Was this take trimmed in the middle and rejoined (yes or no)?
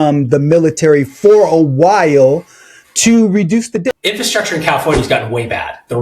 yes